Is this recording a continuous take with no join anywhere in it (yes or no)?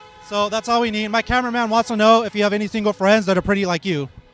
yes